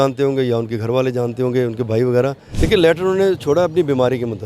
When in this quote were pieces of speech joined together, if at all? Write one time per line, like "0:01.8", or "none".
0:02.5